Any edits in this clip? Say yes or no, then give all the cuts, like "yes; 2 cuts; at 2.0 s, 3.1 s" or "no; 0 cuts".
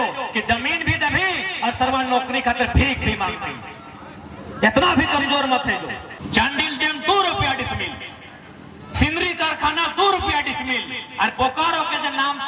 yes; 1 cut; at 6.1 s